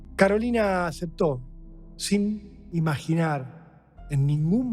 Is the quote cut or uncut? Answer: uncut